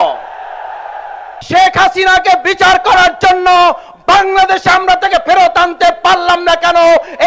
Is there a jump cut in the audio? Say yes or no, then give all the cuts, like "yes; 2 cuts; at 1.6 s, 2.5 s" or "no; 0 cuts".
yes; 1 cut; at 1.3 s